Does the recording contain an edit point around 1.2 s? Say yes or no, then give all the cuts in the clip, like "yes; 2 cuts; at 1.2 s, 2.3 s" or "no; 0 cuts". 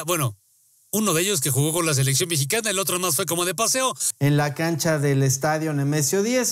no; 1 cut; at 4.1 s